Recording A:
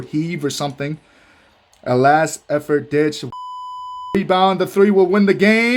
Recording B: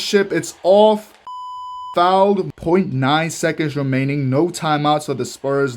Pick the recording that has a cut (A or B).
B